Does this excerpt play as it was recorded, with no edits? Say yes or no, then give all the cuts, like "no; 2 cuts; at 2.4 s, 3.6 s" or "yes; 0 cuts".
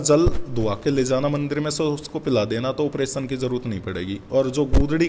yes; 0 cuts